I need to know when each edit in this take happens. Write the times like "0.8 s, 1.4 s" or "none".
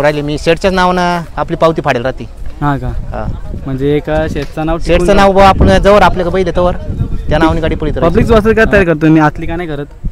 8.0 s